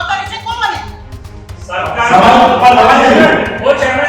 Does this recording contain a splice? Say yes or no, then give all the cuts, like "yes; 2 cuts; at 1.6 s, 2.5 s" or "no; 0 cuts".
no; 0 cuts